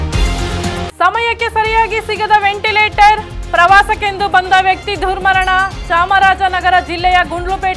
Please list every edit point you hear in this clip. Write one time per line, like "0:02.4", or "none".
0:00.9